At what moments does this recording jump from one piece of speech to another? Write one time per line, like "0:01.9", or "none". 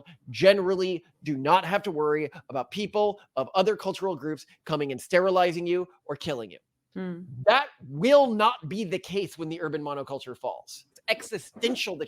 0:10.8